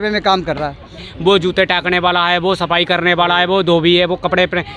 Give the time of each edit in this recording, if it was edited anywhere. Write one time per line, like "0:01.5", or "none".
0:01.0